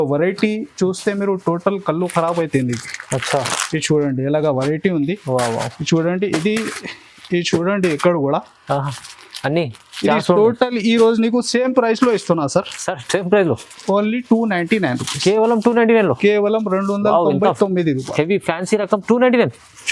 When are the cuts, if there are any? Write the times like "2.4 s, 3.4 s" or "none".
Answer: none